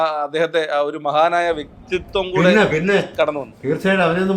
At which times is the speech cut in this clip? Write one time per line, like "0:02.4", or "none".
none